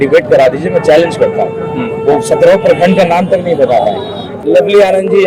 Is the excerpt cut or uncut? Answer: cut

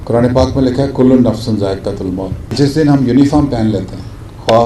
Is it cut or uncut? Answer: cut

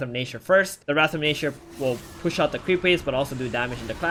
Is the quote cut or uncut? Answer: uncut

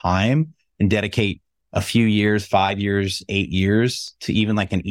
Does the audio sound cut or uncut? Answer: uncut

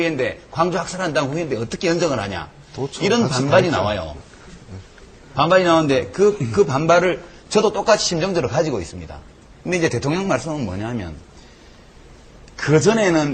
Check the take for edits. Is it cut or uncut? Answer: uncut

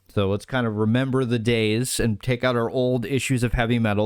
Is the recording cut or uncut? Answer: uncut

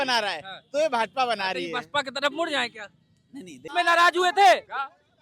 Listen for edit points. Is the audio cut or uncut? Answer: cut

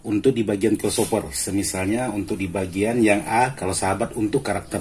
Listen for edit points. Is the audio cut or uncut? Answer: uncut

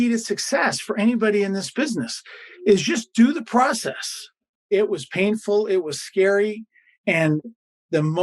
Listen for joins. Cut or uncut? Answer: cut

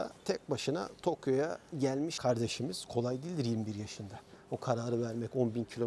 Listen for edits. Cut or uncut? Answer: cut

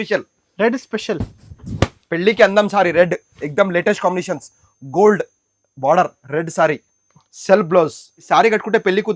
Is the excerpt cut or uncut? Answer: cut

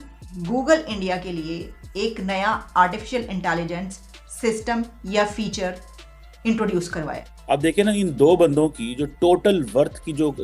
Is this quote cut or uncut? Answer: cut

